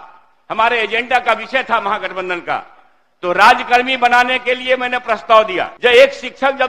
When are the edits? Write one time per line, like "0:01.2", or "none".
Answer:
0:05.7